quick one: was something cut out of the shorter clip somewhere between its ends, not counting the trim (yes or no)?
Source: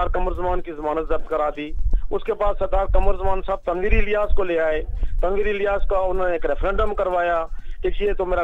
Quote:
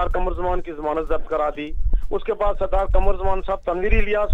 no